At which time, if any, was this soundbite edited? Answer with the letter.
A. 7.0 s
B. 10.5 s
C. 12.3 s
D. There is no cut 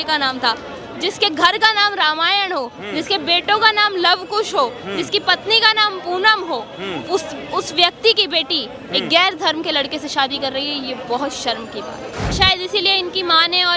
C